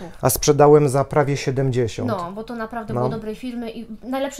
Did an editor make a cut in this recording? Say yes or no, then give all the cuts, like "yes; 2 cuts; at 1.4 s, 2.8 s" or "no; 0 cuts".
no; 0 cuts